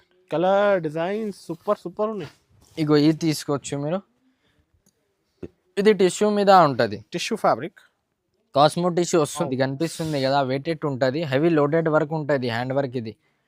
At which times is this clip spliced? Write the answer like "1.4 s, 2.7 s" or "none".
9.4 s